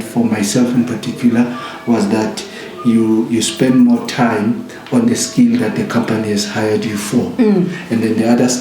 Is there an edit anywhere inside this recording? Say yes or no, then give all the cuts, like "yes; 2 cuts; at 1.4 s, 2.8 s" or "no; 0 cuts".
no; 0 cuts